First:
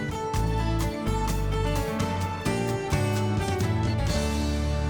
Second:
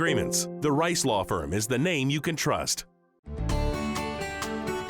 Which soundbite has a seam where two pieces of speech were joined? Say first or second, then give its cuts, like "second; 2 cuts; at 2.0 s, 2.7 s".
second; 1 cut; at 3.4 s